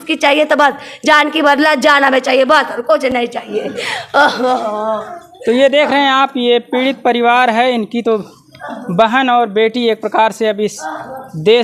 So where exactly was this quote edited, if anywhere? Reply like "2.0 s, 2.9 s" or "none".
none